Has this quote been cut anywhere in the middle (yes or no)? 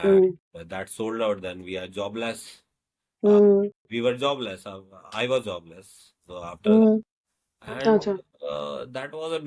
no